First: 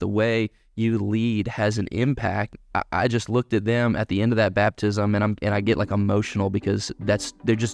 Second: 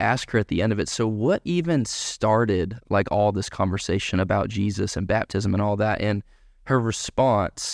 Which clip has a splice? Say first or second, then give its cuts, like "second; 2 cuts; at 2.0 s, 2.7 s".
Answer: first; 1 cut; at 2.6 s